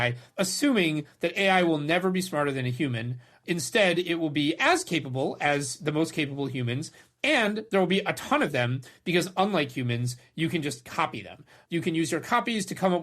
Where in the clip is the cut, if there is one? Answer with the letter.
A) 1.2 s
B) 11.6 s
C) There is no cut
B